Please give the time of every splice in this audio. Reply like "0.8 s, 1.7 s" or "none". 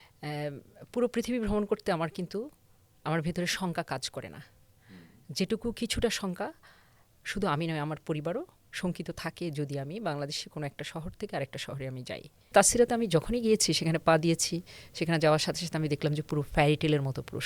12.5 s